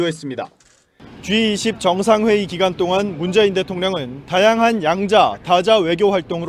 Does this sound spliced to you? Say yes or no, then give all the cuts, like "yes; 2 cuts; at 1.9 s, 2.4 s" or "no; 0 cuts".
no; 0 cuts